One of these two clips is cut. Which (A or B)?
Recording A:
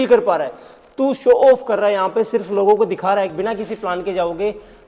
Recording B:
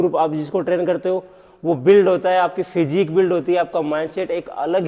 A